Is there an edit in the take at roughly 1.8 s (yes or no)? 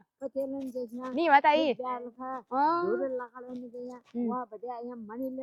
no